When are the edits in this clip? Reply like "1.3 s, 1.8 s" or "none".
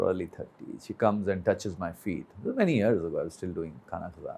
none